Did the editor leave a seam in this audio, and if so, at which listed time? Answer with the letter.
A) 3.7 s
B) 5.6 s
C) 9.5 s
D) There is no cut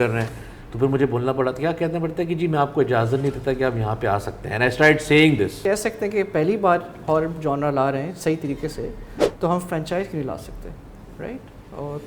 B